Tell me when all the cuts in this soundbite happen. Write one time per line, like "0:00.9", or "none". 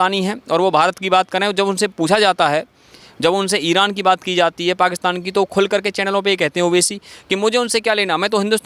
none